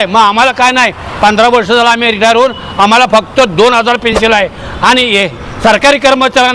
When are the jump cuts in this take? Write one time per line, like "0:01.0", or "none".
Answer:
0:04.2

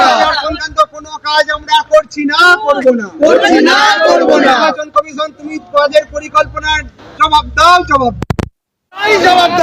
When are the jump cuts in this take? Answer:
none

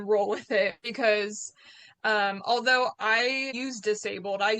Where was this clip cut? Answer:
0:03.5

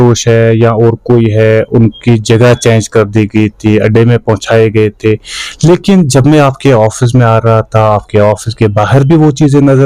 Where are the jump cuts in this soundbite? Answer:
none

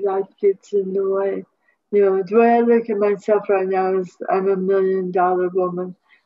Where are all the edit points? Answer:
none

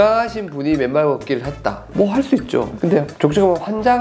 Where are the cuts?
0:02.8

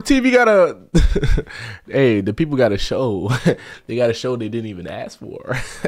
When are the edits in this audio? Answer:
none

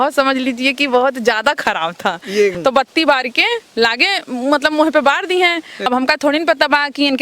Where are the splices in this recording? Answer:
0:02.6
0:05.7

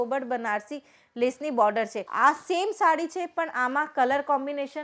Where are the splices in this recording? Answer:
0:02.0

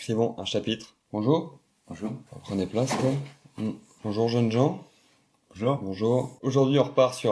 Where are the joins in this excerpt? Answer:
0:00.9
0:02.2
0:03.9
0:06.4

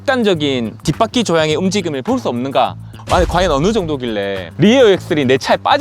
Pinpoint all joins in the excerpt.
0:02.9
0:04.4

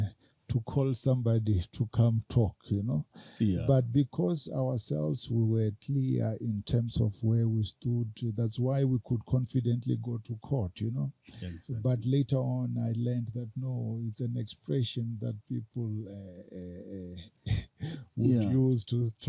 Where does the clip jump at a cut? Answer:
none

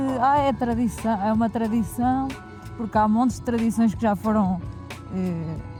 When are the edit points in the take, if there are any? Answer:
none

